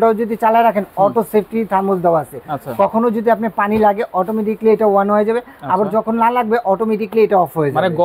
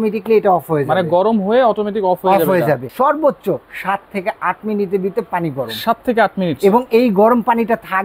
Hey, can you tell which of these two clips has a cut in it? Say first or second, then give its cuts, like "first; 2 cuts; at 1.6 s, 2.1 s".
second; 1 cut; at 2.9 s